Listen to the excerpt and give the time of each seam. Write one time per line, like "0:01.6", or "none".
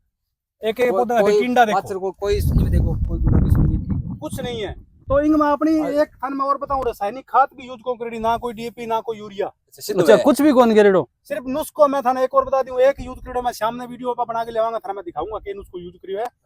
0:04.9

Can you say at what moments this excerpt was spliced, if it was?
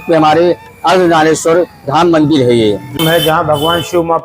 0:02.9

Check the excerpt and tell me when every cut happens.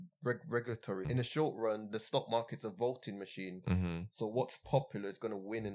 0:01.1

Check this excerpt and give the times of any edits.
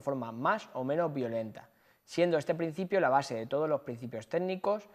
none

